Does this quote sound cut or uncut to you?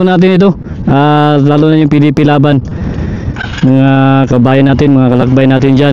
uncut